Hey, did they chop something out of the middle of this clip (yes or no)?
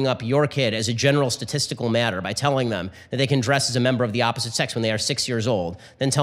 no